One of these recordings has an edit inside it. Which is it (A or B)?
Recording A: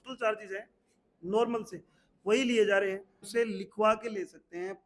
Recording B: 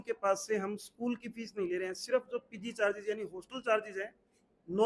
A